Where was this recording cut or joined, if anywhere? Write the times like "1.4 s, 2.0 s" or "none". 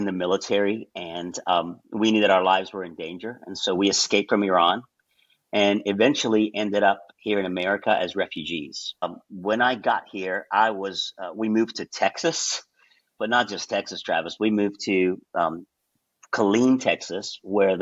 9.0 s